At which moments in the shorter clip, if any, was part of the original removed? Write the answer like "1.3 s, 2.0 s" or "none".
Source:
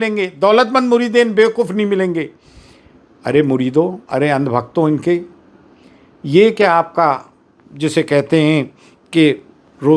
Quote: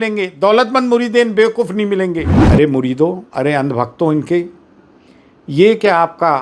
2.4 s